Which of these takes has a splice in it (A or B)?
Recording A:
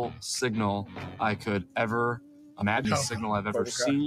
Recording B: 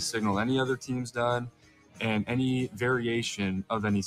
A